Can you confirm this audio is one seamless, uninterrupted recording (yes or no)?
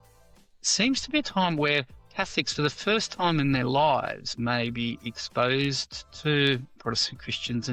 yes